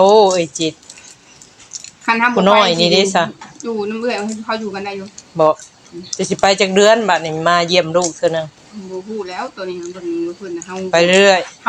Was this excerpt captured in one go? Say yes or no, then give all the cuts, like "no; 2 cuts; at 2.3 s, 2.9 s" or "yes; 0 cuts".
yes; 0 cuts